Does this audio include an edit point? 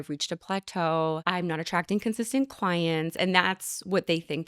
yes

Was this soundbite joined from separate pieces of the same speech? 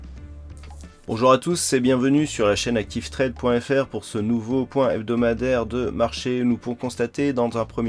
yes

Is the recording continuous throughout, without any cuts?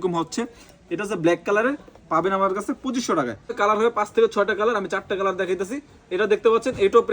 no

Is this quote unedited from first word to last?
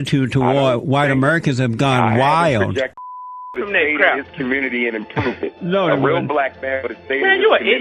no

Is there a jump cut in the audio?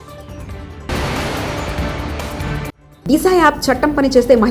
yes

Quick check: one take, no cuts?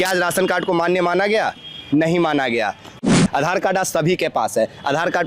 no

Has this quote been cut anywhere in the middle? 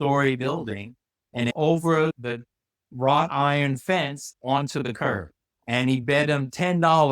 yes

